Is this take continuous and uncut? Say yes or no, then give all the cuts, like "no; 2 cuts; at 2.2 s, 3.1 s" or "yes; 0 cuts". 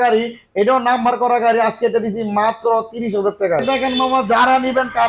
no; 1 cut; at 3.6 s